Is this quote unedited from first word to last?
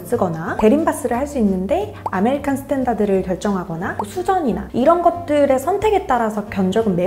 yes; 0 cuts

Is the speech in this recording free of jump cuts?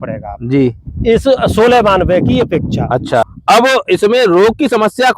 no; 1 cut; at 3.3 s

